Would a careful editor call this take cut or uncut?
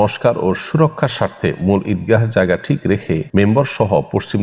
cut